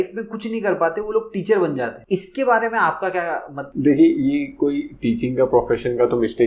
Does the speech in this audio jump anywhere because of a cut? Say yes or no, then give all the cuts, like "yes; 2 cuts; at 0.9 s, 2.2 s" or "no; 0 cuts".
no; 0 cuts